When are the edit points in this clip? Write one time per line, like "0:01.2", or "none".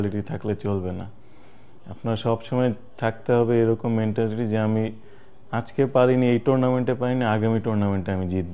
none